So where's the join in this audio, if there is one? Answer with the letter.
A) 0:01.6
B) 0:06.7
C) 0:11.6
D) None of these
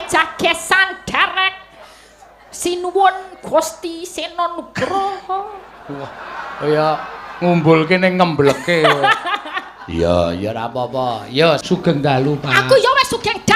C